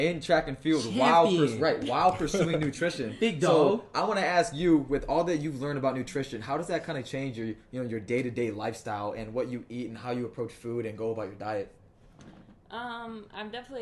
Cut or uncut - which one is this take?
uncut